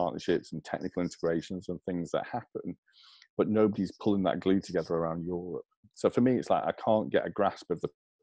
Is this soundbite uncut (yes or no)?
no